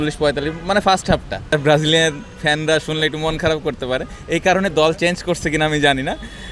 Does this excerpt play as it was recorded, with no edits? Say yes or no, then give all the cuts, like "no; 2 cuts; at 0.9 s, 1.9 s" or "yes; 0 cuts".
no; 1 cut; at 1.5 s